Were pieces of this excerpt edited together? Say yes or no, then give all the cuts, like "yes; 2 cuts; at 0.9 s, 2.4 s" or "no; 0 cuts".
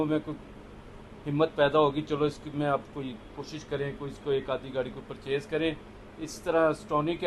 no; 0 cuts